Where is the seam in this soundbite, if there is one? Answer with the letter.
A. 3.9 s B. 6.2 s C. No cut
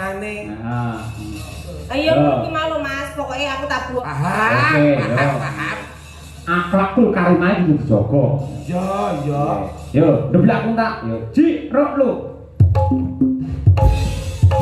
A